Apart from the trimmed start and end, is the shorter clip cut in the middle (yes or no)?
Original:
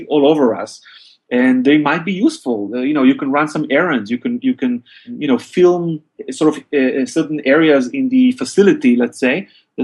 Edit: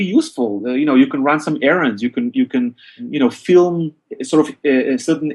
no